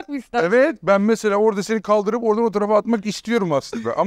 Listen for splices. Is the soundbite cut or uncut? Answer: uncut